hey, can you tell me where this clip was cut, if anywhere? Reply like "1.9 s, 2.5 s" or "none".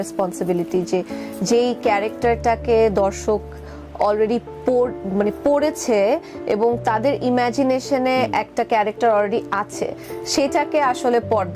none